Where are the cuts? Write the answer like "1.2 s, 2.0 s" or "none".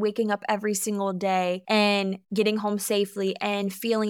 2.0 s